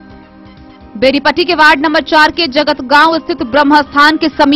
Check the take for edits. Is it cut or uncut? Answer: cut